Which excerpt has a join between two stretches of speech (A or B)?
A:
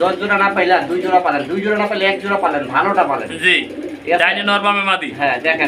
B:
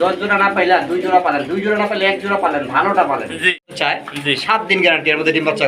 B